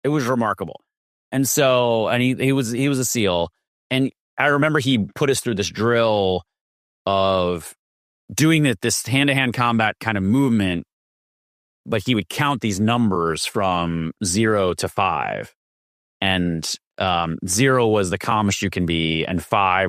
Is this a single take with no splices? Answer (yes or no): yes